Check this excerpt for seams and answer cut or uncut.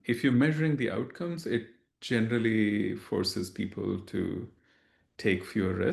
uncut